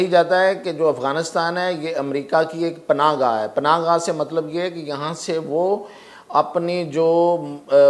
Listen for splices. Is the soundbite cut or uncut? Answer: uncut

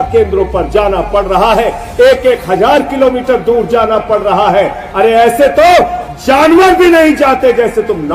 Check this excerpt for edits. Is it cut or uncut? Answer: uncut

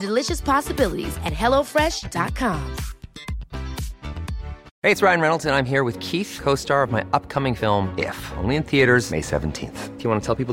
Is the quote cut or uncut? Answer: cut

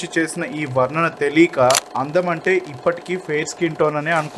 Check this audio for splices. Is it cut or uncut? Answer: uncut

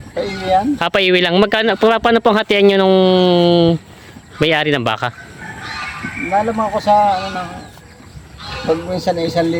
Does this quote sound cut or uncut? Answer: uncut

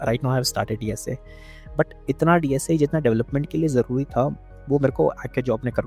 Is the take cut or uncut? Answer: uncut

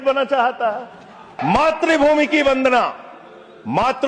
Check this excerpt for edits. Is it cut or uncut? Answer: cut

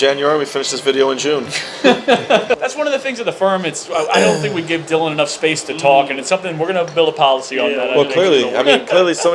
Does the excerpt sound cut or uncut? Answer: cut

